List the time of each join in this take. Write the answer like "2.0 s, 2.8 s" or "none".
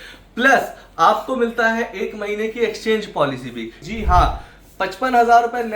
3.9 s